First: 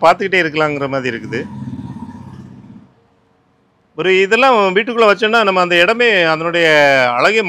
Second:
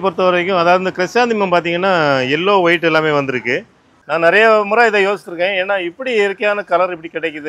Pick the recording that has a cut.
second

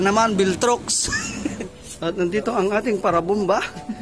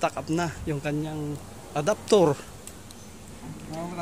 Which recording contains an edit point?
first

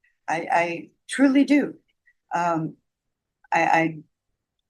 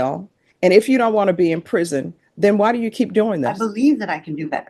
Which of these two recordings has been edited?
second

